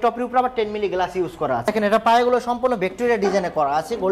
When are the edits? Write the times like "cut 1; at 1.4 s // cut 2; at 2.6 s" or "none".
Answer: cut 1; at 1.7 s